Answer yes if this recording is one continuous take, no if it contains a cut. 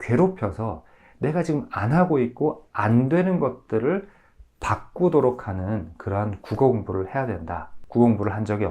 no